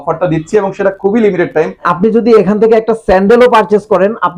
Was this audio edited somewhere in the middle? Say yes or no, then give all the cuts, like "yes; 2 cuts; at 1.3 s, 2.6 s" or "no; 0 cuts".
yes; 1 cut; at 1.8 s